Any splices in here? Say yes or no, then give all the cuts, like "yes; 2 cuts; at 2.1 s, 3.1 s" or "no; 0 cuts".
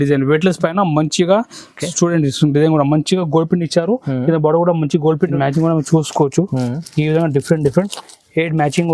yes; 1 cut; at 5.3 s